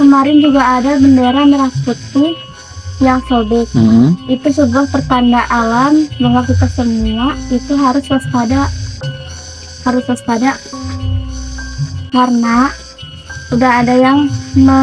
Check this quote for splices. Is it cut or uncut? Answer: uncut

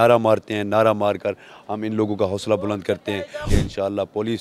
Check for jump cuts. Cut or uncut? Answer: cut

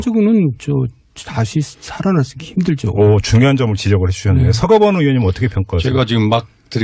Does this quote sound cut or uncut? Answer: cut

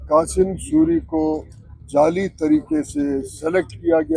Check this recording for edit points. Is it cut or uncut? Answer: uncut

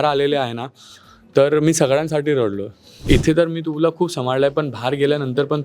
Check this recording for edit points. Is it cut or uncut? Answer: cut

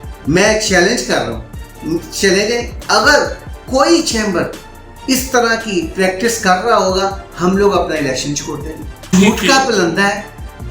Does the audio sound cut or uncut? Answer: cut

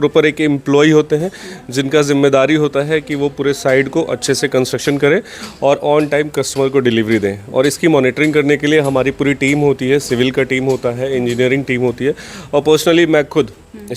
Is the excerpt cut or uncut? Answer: uncut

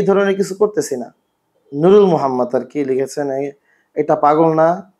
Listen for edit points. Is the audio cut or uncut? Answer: uncut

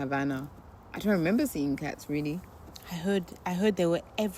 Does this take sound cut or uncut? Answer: uncut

